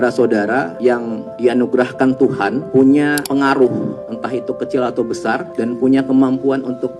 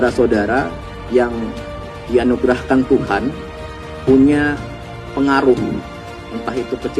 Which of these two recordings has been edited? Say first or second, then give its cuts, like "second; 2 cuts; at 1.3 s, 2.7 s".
first; 5 cuts; at 0.9 s, 2.6 s, 3.2 s, 4.1 s, 5.5 s